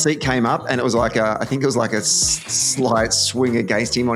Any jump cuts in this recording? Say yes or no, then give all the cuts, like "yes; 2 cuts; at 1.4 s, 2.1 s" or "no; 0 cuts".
no; 0 cuts